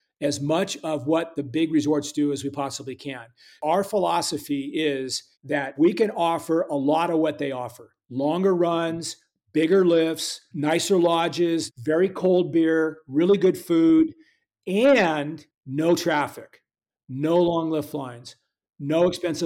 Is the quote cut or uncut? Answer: cut